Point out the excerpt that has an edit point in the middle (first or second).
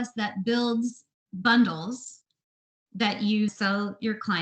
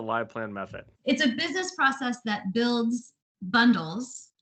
first